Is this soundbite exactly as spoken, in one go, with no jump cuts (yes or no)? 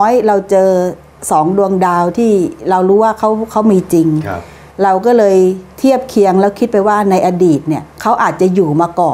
yes